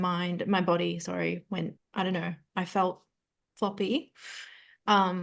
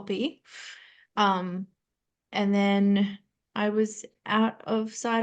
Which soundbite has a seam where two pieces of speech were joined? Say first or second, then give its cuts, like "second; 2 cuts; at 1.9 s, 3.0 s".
first; 1 cut; at 1.8 s